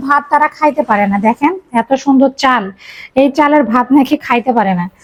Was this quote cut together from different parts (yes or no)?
no